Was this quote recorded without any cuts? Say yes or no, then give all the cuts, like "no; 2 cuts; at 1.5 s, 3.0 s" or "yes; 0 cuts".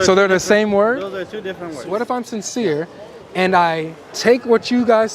no; 1 cut; at 2.0 s